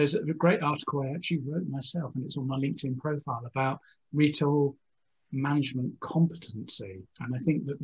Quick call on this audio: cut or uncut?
uncut